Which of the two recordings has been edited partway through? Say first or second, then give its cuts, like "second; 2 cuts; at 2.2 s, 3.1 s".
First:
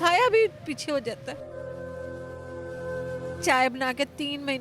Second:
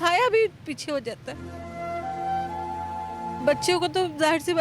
first; 2 cuts; at 1.3 s, 3.4 s